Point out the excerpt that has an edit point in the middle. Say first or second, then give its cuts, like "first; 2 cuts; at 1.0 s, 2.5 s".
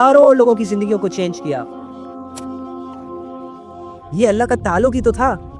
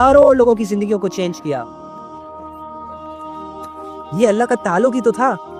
second; 2 cuts; at 1.7 s, 4.1 s